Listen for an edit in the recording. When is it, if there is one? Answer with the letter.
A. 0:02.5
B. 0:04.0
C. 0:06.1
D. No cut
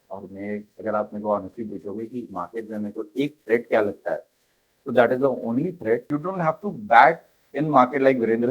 C